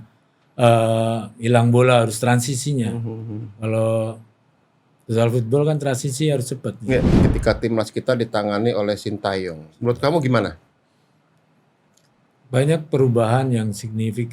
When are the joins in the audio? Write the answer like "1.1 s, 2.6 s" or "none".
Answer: 7.2 s